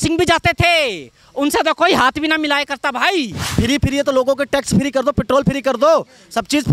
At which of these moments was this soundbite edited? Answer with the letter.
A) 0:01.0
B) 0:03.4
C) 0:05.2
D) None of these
B